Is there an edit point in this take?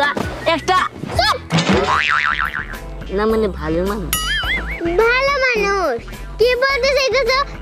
no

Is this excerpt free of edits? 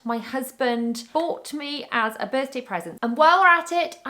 no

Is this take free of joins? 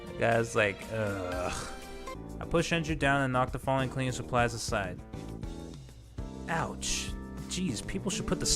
no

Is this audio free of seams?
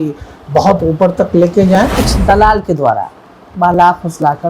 no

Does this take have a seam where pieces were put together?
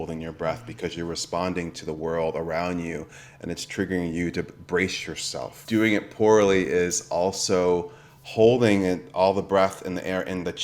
yes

